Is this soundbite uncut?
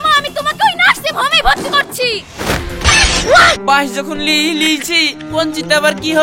no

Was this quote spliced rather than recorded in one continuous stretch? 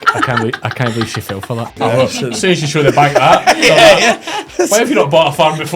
yes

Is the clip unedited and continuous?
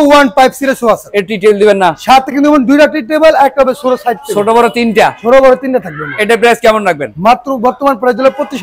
yes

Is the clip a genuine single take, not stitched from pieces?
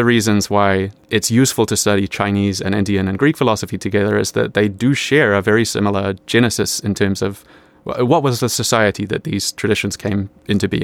no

